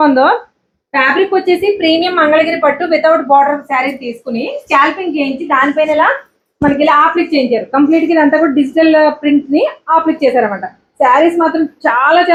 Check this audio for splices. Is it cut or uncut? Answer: uncut